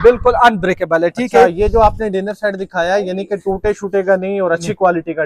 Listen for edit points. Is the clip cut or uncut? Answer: uncut